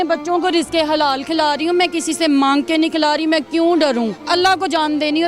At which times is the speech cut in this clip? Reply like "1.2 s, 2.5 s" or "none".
4.2 s